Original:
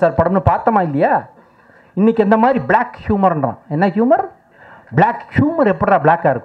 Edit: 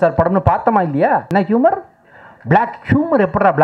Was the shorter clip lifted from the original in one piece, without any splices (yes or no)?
no